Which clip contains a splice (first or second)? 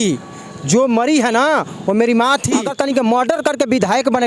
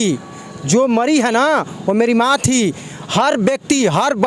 first